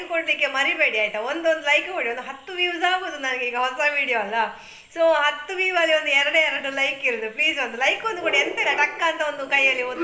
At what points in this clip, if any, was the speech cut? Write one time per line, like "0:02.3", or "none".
none

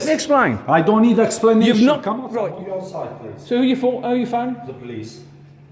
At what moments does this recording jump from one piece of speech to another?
0:02.2

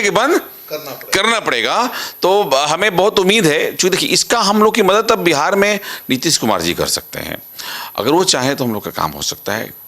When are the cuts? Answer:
none

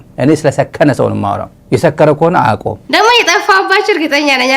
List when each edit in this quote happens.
0:02.8

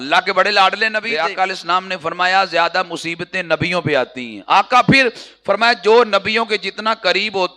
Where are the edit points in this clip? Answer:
0:01.0

